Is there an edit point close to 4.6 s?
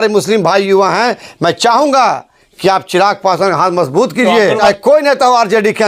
yes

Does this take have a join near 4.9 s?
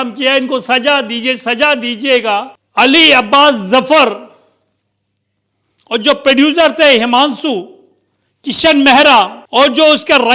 no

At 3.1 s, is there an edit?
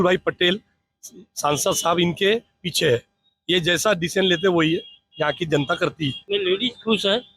no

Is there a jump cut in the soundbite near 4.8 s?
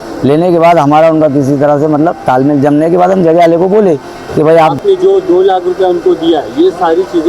yes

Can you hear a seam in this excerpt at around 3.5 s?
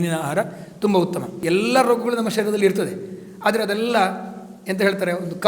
no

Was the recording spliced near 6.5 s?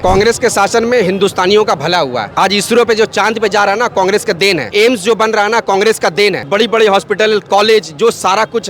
yes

